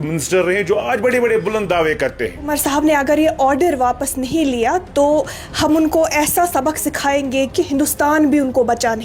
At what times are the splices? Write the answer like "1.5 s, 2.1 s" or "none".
2.5 s

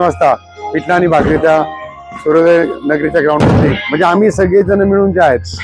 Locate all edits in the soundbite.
3.8 s

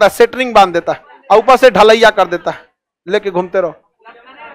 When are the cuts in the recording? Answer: none

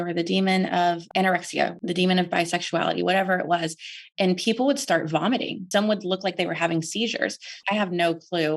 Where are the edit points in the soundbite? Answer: 1.2 s, 5.6 s, 7.6 s

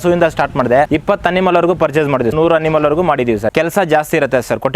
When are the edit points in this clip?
0.9 s, 2.3 s, 3.5 s

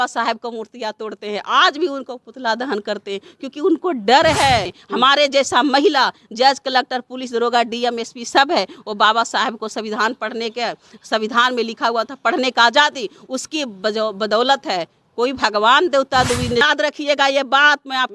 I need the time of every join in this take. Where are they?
4.8 s, 16.6 s

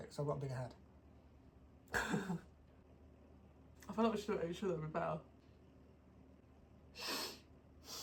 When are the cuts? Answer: none

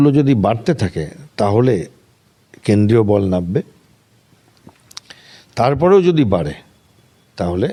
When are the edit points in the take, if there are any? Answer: none

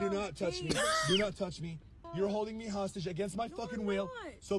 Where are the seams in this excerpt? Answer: 2.0 s

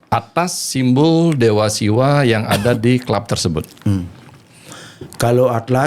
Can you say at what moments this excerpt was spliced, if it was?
none

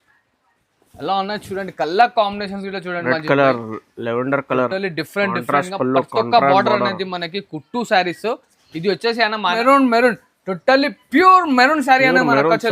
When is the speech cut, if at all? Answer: 9.6 s

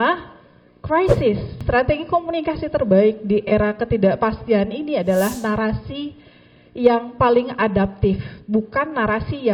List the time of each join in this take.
1.6 s

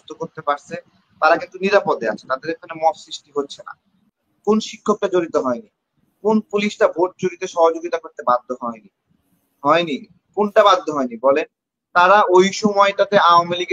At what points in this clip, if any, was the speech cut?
3.9 s

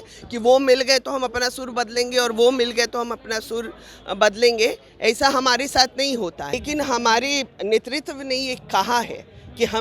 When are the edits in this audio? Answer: 6.6 s

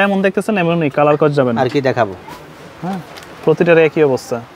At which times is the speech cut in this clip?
none

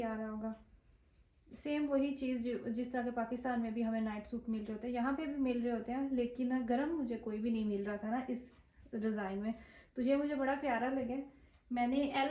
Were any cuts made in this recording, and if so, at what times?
none

